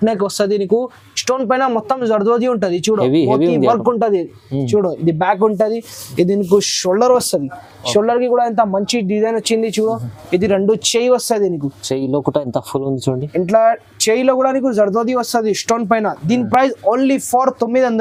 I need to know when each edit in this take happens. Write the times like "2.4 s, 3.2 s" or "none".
none